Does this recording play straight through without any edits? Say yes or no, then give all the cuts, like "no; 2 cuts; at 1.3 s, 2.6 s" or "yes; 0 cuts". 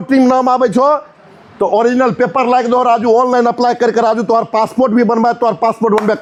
yes; 0 cuts